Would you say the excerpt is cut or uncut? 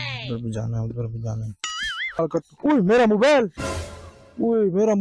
cut